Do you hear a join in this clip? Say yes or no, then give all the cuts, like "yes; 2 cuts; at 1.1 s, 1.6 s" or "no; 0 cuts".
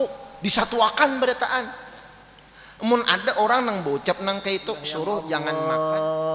yes; 1 cut; at 5.4 s